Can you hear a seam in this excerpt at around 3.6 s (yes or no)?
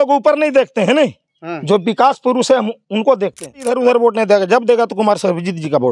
yes